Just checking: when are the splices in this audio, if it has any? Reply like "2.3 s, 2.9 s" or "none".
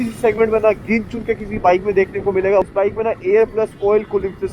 2.6 s